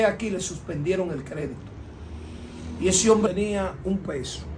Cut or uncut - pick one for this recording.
cut